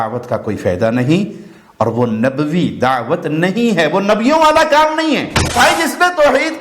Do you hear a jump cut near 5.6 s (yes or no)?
yes